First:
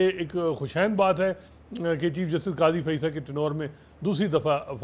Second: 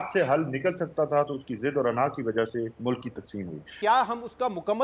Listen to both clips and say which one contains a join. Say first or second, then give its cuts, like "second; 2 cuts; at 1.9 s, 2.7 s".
second; 1 cut; at 3.7 s